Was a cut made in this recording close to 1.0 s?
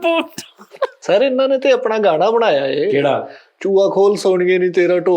yes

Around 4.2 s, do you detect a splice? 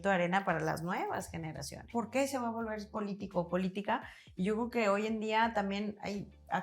no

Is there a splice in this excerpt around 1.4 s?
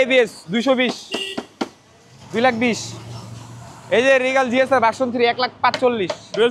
no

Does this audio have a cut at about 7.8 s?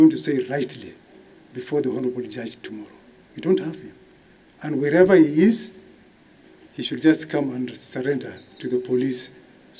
no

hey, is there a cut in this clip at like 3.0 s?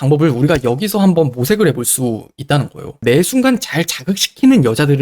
yes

